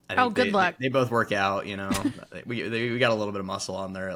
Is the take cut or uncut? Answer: uncut